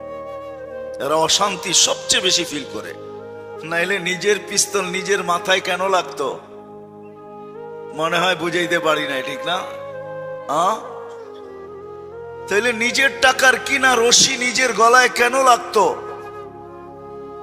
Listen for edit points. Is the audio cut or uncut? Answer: cut